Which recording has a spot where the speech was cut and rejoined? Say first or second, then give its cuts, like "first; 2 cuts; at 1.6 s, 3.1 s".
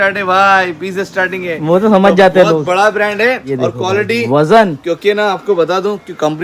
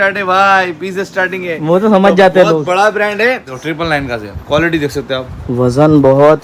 second; 1 cut; at 3.5 s